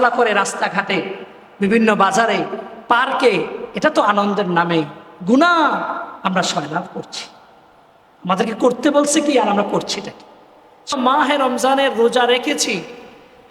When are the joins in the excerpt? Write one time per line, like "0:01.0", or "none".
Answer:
0:10.9

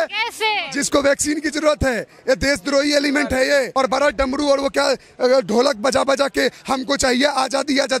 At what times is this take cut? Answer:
0:03.7

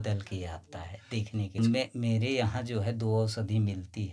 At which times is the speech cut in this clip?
0:01.6

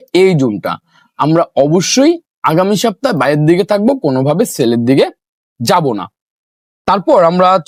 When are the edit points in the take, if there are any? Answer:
none

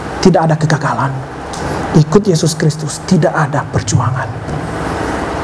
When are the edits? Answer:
none

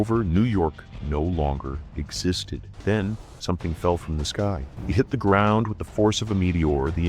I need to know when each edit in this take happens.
0:02.6
0:04.7

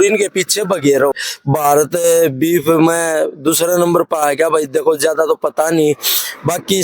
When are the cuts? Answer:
0:01.1

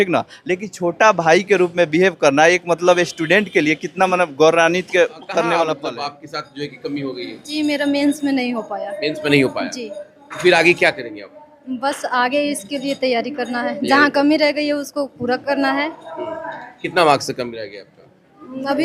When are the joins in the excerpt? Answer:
0:05.7

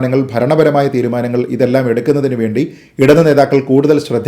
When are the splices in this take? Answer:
none

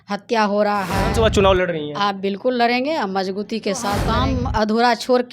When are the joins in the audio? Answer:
0:01.0
0:04.1

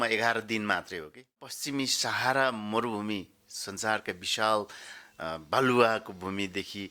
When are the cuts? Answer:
0:01.6

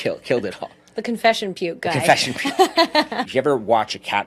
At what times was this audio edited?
0:03.2

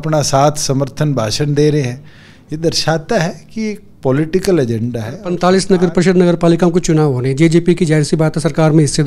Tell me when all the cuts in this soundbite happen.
0:05.1

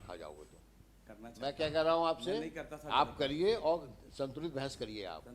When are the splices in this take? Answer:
0:01.1

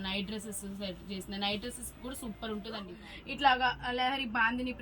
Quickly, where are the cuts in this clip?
0:03.0

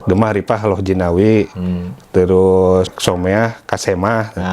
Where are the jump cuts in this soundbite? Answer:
0:02.9

